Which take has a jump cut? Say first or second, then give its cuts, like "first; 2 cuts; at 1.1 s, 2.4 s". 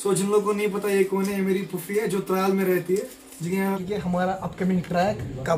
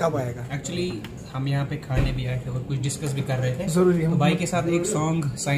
first; 1 cut; at 3.8 s